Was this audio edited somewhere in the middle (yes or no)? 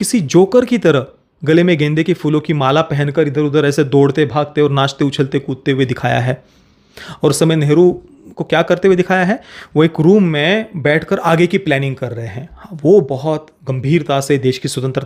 no